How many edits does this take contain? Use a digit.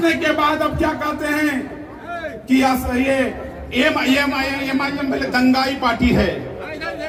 0